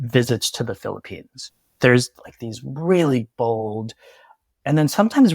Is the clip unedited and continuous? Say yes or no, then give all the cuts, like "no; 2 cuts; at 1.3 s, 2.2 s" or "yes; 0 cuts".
no; 1 cut; at 1.6 s